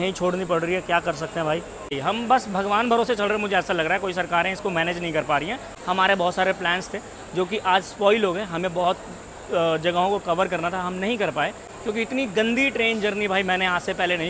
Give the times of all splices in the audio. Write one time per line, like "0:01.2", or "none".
0:02.0
0:05.7
0:11.7